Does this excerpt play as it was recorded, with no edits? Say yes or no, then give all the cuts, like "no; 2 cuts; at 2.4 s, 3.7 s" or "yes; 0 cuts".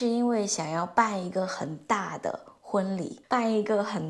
no; 1 cut; at 3.2 s